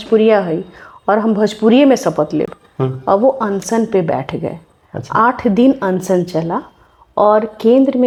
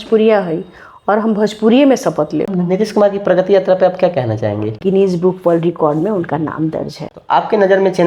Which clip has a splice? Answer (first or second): second